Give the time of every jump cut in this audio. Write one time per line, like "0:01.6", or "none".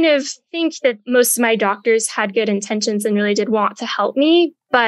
0:01.0